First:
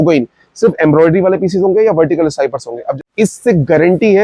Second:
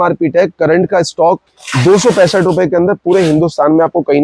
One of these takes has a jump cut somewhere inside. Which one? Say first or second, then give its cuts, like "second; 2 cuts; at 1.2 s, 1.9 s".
first; 1 cut; at 2.9 s